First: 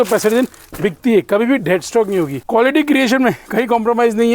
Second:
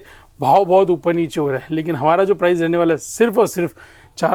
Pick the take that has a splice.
first; 1 cut; at 2.4 s

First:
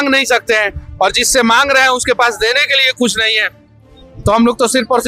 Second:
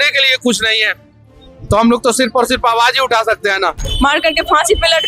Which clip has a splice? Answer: second; 1 cut; at 3.8 s

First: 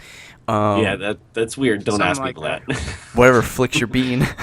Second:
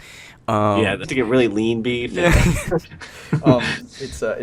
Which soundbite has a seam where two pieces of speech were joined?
first; 1 cut; at 1.0 s

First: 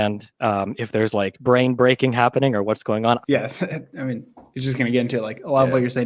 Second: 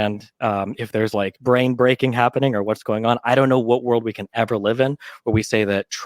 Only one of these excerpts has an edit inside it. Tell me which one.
second; 1 cut; at 3.1 s

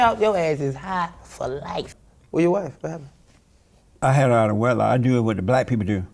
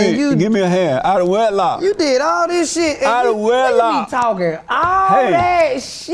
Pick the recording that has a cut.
first; 1 cut; at 1.9 s

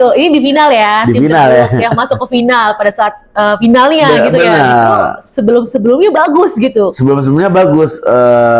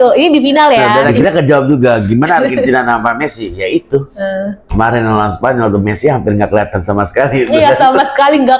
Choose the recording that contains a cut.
second; 1 cut; at 1.0 s

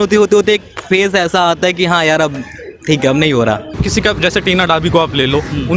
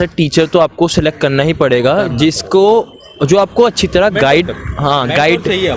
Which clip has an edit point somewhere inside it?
first; 1 cut; at 3.7 s

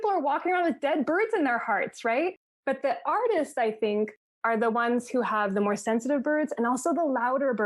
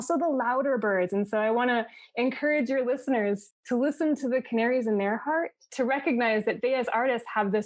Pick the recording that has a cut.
second; 1 cut; at 3.5 s

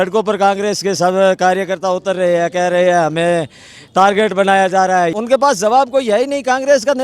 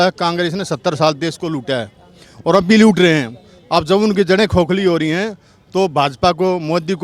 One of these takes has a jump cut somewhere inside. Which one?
first; 1 cut; at 5.1 s

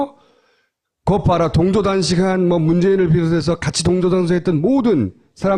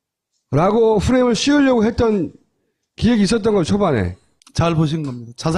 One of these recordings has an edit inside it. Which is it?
second; 1 cut; at 4.2 s

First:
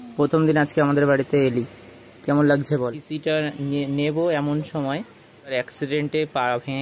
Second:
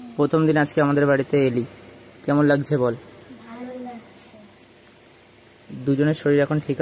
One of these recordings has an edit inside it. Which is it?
first; 2 cuts; at 3.1 s, 5.5 s

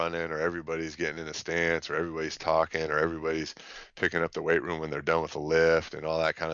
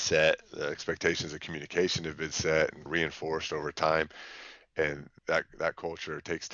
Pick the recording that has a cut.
second; 2 cuts; at 2.9 s, 5.0 s

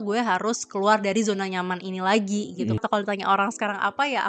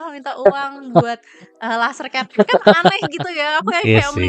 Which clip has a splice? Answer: first; 1 cut; at 2.8 s

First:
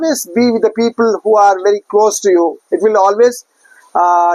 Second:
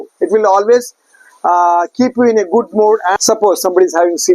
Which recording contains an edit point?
second; 1 cut; at 3.2 s

